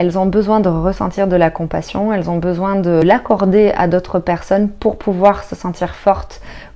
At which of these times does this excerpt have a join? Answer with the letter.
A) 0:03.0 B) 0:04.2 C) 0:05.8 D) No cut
A